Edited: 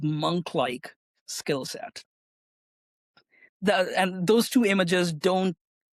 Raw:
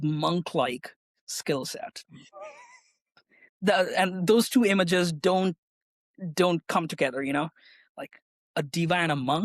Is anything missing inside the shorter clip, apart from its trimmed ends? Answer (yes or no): no